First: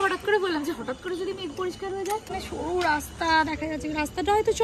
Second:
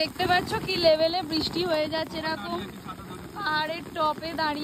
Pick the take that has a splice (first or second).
first